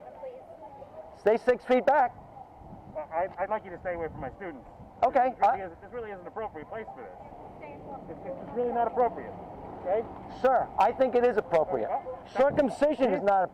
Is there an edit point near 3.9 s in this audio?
no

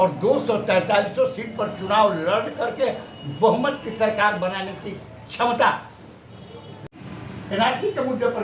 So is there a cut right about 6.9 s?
yes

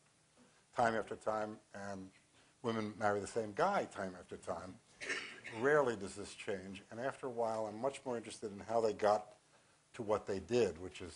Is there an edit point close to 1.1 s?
no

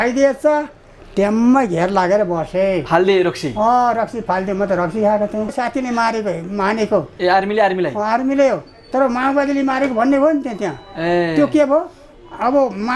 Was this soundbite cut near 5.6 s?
yes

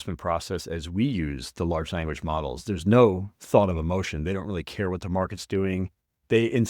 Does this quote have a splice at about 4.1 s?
no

